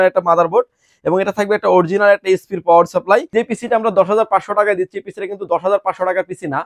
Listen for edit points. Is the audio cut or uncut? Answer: cut